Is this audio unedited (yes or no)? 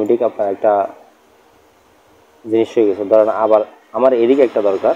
yes